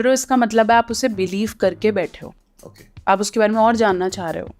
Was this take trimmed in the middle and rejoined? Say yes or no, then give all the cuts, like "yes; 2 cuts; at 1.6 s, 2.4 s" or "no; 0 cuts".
no; 0 cuts